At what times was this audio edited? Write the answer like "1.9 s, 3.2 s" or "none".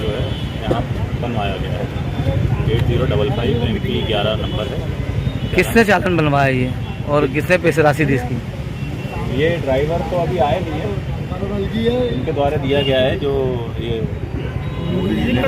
none